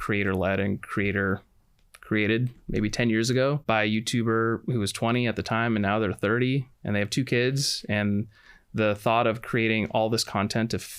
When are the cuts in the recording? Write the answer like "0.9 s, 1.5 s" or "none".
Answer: 3.6 s